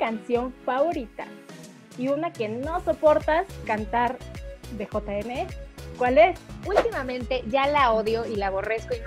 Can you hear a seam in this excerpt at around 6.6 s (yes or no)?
yes